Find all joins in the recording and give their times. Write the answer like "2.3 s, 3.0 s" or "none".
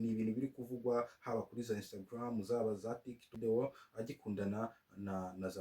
3.3 s